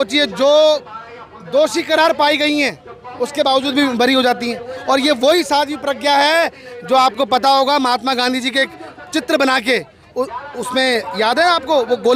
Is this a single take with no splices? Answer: yes; 0 cuts

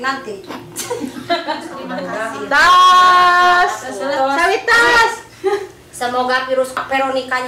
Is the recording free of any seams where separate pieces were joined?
no; 1 cut; at 2.0 s

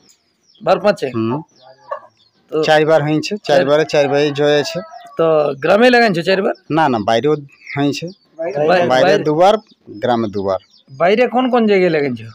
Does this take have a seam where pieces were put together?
no; 0 cuts

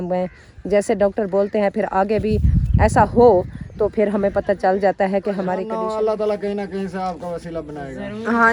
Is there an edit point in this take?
yes; 1 cut; at 5.7 s

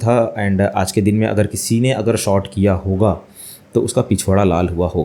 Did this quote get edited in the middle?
no; 0 cuts

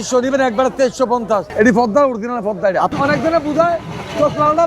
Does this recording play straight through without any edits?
no; 2 cuts; at 1.5 s, 2.9 s

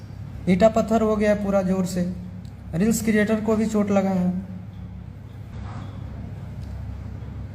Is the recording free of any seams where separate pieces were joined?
no; 1 cut; at 5.5 s

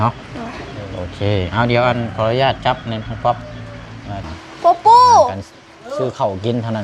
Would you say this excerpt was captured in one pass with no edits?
no; 1 cut; at 4.3 s

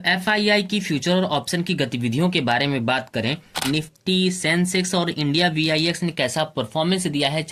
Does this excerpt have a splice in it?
yes; 1 cut; at 3.6 s

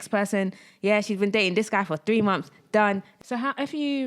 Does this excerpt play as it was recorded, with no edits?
no; 1 cut; at 3.1 s

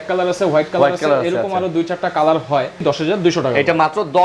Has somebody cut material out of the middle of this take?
yes; 1 cut; at 2.8 s

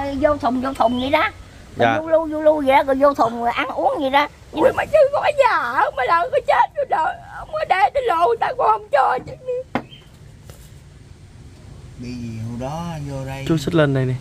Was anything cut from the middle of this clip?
yes; 1 cut; at 4.6 s

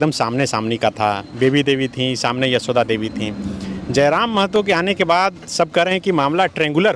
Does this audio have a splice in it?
no; 0 cuts

